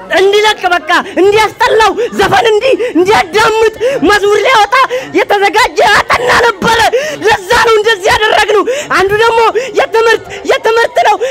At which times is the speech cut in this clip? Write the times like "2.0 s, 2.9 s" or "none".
none